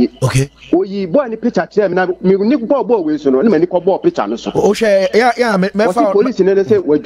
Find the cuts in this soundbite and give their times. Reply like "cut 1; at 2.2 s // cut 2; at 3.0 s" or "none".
none